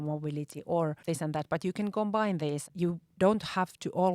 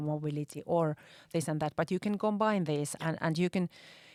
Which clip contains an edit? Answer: first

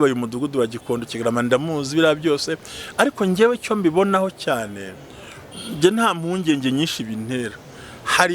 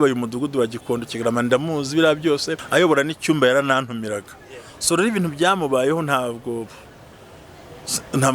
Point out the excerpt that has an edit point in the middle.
second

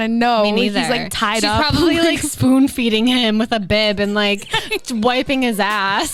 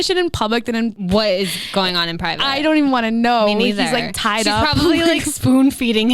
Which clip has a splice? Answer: second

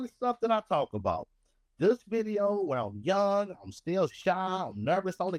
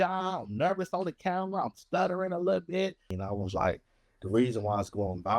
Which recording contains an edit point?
second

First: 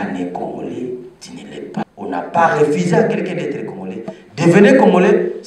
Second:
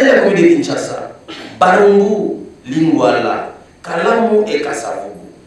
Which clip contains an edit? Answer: first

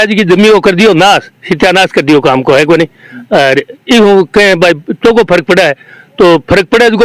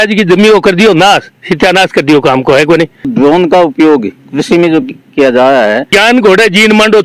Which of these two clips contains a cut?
second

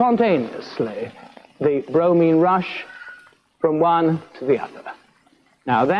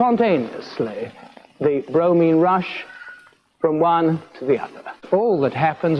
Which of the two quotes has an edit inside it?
second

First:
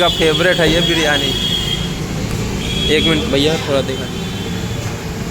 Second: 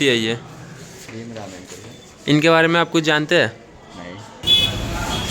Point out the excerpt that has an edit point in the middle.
second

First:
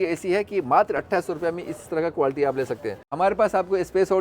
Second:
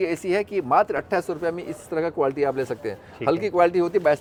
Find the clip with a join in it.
first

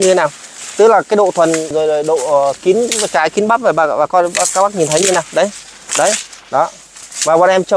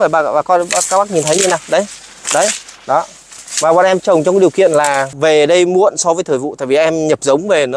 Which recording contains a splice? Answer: first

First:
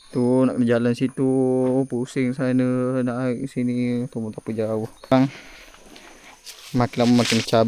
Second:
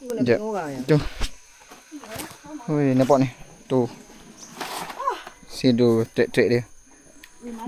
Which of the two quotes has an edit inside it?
first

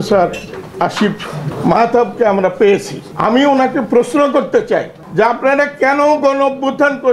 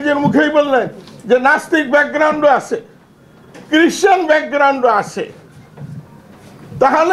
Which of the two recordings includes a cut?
first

